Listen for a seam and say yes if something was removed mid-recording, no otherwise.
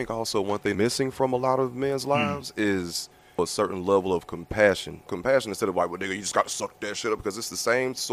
yes